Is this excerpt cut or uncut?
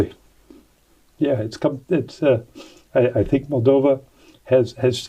uncut